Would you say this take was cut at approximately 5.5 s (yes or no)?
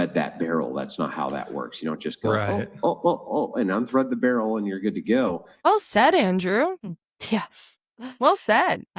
yes